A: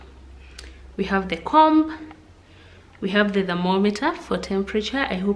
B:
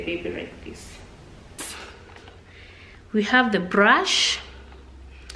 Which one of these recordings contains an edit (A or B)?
B